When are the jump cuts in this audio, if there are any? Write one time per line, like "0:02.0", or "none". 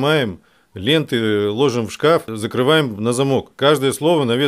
0:02.4
0:03.5